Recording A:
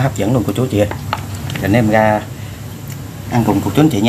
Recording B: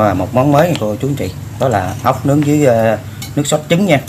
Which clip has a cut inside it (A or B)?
A